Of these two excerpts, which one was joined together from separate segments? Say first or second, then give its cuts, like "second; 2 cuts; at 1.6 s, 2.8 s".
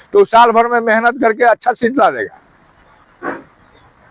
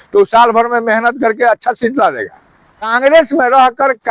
second; 1 cut; at 2.9 s